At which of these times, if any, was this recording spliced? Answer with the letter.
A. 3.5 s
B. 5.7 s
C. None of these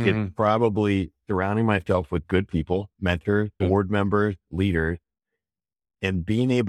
A